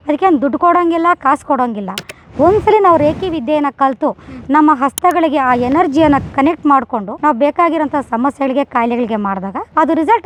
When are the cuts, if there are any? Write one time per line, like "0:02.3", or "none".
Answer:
none